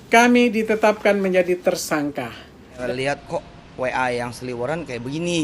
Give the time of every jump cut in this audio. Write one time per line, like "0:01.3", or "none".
0:02.8